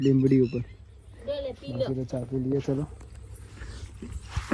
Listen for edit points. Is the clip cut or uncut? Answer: uncut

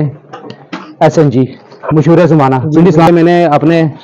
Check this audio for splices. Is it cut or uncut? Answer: cut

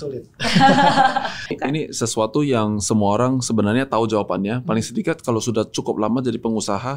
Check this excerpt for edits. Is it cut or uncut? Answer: cut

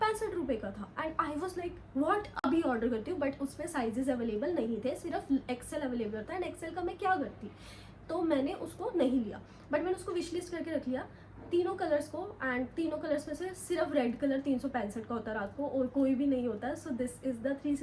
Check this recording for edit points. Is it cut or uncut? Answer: uncut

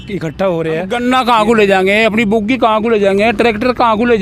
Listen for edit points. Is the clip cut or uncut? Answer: cut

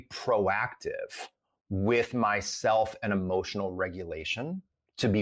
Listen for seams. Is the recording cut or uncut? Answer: uncut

